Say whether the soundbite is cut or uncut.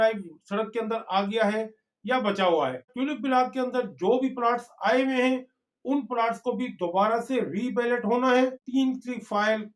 cut